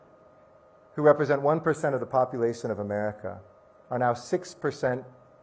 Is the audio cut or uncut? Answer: uncut